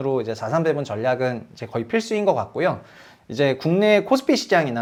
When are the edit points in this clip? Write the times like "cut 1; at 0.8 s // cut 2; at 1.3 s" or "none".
none